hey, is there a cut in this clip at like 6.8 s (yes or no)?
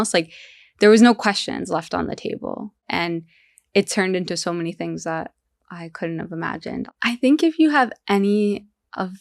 yes